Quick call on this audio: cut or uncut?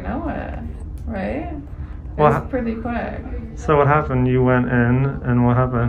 uncut